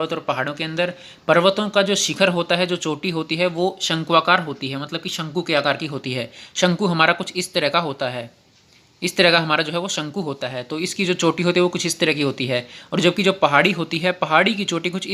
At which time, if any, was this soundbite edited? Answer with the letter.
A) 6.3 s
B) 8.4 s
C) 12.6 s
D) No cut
D